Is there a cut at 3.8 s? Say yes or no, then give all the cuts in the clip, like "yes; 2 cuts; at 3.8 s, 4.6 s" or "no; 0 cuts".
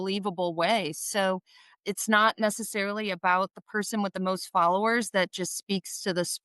no; 0 cuts